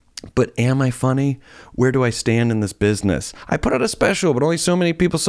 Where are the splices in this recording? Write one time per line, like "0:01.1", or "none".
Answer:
0:03.4